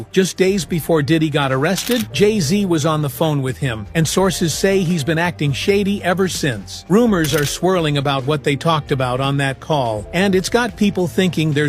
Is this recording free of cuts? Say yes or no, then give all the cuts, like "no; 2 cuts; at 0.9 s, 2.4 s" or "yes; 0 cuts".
yes; 0 cuts